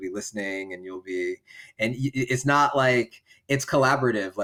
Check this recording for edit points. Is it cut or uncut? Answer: uncut